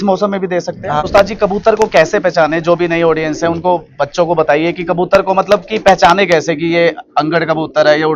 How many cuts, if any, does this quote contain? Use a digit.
1